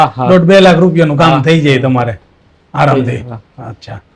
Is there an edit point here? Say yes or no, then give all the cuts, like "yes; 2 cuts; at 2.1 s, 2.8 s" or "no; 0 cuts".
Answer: no; 0 cuts